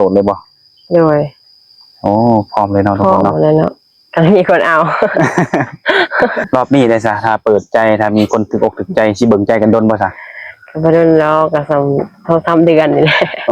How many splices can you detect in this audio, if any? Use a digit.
1